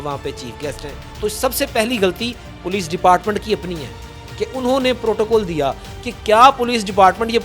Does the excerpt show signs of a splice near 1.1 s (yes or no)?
yes